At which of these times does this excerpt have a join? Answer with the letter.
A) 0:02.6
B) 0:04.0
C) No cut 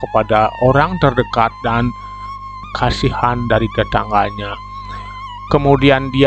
A